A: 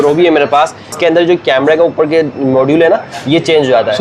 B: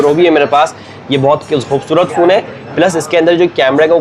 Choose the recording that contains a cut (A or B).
A